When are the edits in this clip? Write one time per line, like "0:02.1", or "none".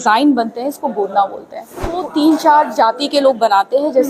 0:02.0